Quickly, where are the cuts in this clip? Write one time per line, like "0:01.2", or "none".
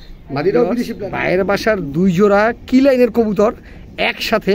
0:01.0